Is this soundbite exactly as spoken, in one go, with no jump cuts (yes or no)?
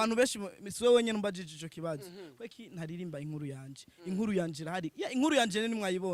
yes